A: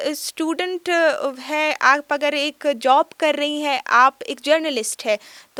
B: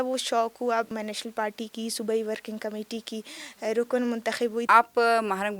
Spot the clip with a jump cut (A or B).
B